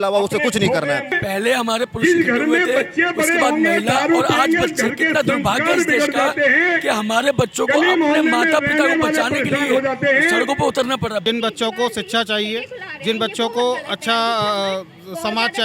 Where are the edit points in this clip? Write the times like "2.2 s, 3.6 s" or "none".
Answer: 1.2 s, 11.2 s